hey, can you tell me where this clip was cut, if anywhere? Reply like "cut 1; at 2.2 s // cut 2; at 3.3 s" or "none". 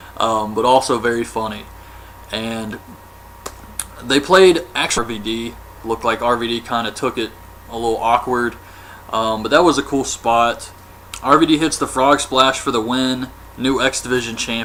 none